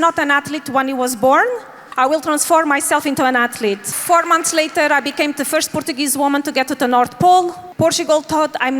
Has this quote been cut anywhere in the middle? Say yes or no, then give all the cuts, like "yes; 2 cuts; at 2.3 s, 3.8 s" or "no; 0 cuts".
yes; 3 cuts; at 1.8 s, 3.9 s, 7.6 s